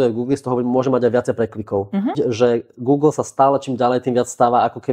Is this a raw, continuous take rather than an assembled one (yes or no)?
no